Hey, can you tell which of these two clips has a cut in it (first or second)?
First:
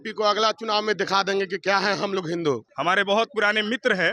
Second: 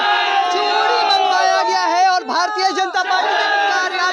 first